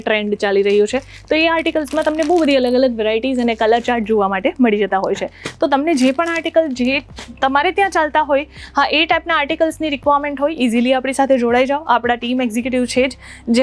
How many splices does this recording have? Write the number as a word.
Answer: zero